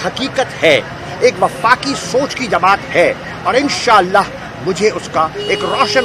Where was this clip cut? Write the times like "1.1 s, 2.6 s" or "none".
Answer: none